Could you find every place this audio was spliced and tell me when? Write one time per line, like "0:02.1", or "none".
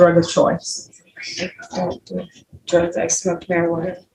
none